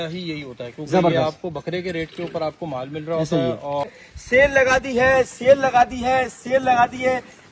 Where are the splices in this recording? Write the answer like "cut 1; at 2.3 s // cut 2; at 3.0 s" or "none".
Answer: cut 1; at 3.9 s